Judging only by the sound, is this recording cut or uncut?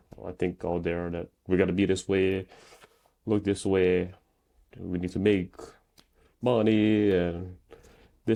uncut